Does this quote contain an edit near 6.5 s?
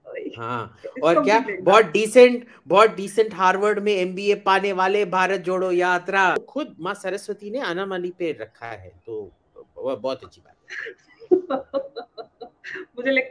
yes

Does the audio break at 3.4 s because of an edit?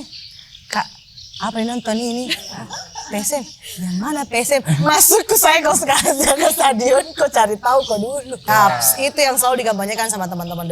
no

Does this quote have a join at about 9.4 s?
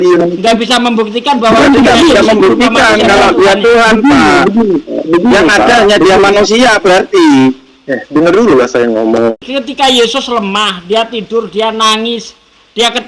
yes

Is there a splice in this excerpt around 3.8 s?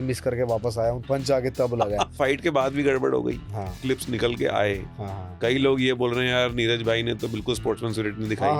yes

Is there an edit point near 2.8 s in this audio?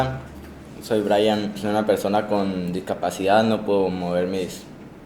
no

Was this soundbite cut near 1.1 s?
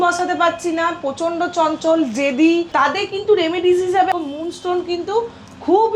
no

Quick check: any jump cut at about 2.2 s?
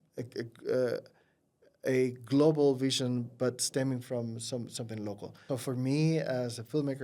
no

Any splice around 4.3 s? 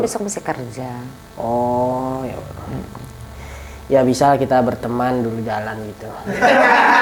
no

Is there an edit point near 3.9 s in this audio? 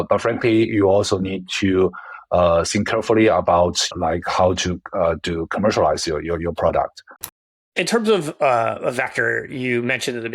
yes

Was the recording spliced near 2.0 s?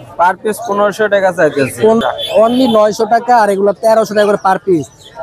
yes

